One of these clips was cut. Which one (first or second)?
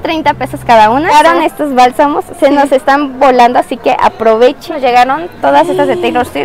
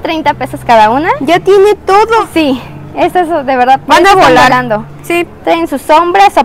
first